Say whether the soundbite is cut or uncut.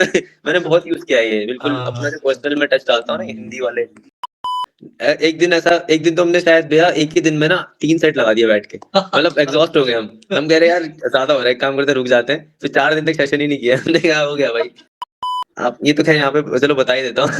cut